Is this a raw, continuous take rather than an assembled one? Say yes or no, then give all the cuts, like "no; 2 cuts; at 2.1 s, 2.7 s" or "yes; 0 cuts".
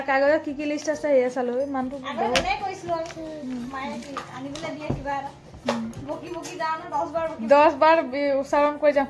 yes; 0 cuts